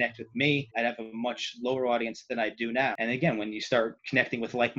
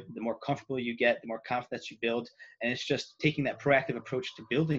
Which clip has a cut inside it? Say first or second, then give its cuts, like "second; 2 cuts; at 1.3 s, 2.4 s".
first; 1 cut; at 3.0 s